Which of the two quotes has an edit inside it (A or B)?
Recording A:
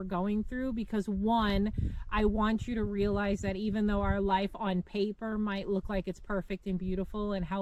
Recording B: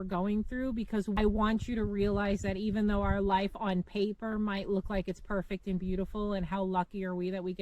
B